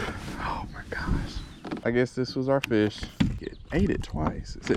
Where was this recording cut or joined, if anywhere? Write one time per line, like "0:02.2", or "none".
0:01.8
0:03.5